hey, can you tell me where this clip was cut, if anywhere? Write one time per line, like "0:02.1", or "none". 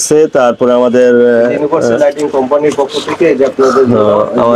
none